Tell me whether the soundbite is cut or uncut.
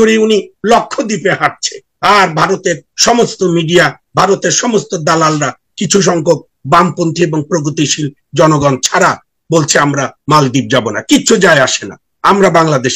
uncut